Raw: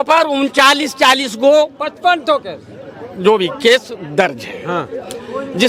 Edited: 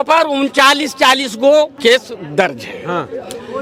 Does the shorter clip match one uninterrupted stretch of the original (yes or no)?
no